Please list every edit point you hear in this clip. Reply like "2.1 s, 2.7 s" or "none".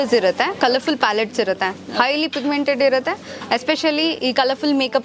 none